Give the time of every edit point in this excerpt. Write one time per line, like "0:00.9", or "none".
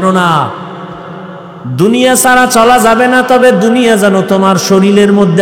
0:01.6

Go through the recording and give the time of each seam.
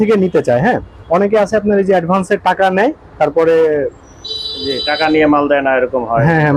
none

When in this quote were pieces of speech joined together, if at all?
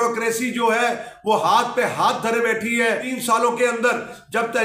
0:03.1

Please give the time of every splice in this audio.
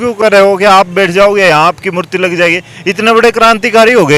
none

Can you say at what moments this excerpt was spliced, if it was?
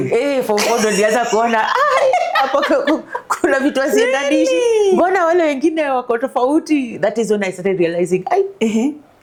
none

